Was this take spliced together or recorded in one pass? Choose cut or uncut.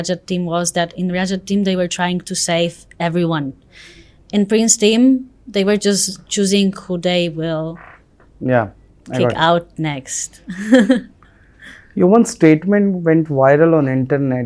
uncut